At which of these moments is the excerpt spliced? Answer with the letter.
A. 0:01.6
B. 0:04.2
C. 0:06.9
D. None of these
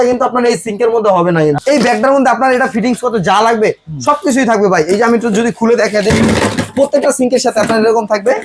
A